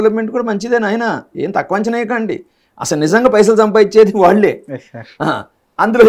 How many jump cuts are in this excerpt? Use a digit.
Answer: 0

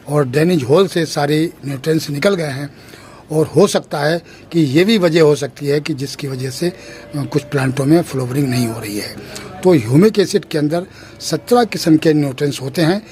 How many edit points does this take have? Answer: 0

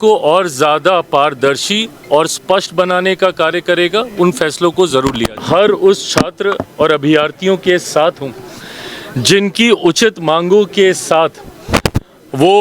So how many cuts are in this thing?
1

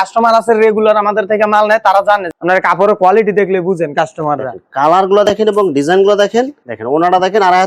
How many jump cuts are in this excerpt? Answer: 2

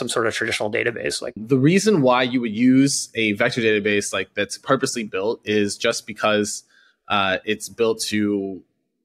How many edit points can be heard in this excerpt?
1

